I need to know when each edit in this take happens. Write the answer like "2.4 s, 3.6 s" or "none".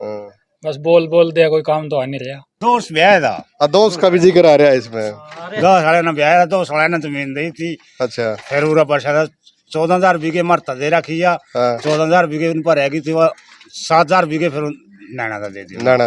2.6 s